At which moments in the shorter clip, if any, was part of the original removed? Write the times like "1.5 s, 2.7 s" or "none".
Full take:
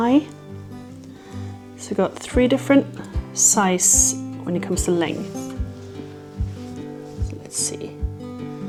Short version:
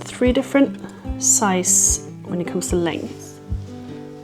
3.1 s

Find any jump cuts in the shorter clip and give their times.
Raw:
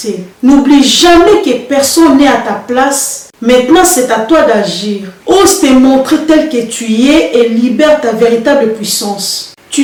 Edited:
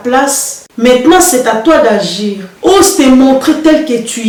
none

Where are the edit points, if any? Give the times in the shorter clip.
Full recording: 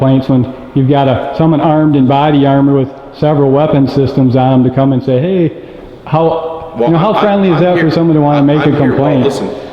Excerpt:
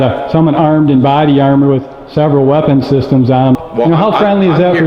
3.6 s

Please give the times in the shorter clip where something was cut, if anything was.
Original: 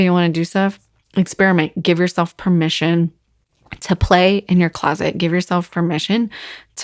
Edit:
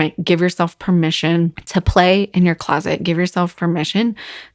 1.6 s

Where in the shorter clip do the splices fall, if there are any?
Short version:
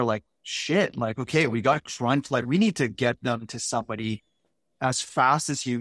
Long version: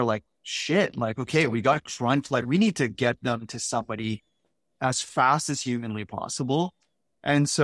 none

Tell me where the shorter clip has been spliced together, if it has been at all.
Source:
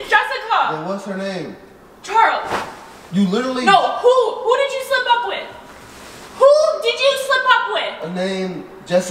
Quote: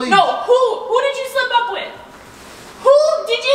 none

